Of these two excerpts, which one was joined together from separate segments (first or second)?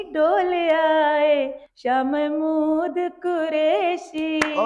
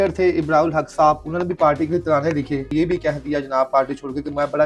second